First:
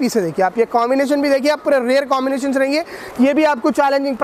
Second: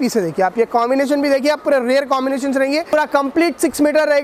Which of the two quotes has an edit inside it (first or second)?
second